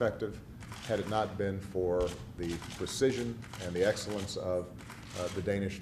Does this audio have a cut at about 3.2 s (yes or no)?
yes